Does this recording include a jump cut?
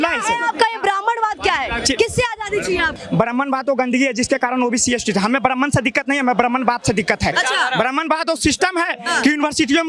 yes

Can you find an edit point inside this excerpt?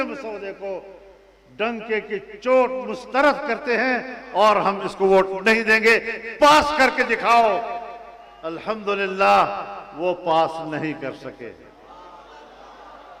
no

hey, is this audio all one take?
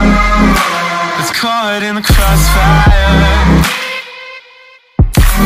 no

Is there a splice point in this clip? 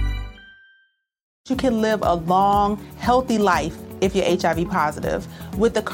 yes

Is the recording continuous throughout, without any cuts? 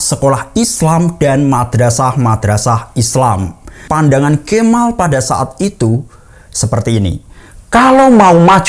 no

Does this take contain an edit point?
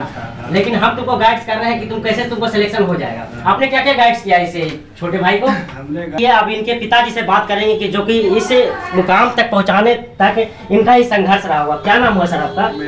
yes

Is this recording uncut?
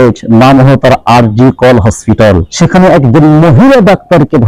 no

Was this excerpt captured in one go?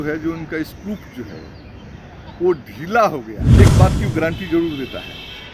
no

